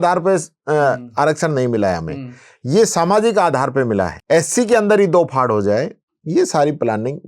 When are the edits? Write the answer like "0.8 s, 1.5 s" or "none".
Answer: 4.1 s